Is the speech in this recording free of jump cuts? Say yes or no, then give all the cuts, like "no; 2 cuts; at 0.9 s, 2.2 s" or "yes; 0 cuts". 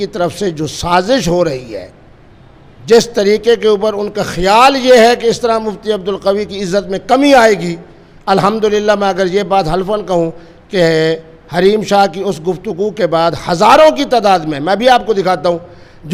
yes; 0 cuts